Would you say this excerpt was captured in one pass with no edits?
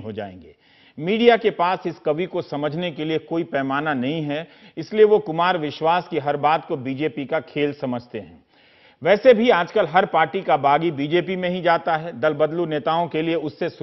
no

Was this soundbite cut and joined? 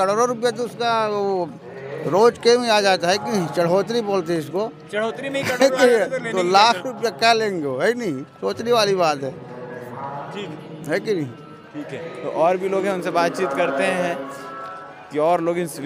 no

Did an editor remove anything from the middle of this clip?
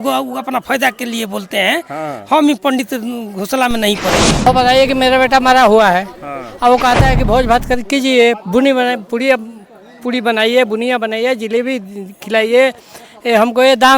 yes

